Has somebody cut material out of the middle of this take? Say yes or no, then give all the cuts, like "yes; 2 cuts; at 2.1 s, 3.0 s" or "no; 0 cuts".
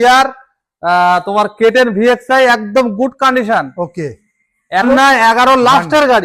yes; 1 cut; at 4.9 s